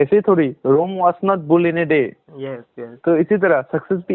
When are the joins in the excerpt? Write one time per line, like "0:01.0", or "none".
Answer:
none